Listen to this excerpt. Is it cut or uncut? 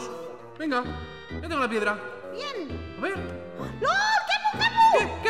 uncut